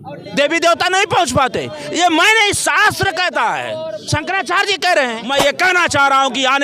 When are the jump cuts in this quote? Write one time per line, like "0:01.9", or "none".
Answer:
0:05.2